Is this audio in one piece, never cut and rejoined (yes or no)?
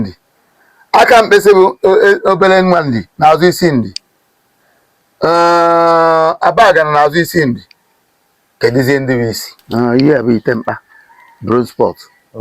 no